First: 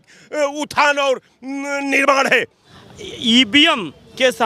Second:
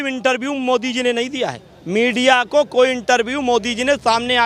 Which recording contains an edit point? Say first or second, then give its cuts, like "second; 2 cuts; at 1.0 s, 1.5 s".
first; 1 cut; at 2.6 s